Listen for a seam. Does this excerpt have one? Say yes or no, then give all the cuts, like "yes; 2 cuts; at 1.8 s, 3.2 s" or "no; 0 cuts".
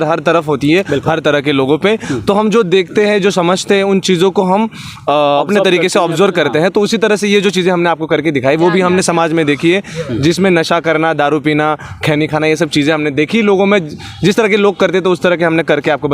no; 0 cuts